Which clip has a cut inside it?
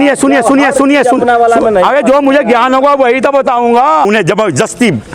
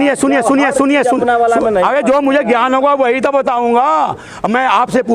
first; 1 cut; at 4.1 s

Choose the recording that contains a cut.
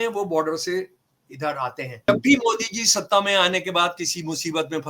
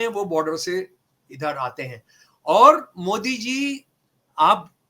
first; 1 cut; at 2.1 s

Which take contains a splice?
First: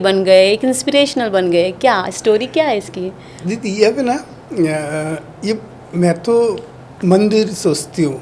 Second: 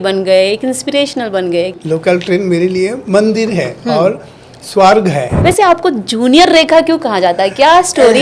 second; 2 cuts; at 1.8 s, 5.3 s

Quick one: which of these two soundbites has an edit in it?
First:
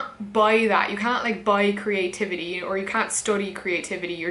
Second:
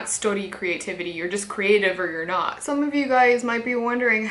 second; 1 cut; at 2.6 s

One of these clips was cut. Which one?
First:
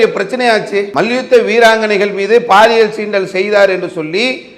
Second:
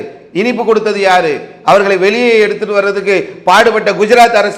first; 1 cut; at 0.9 s

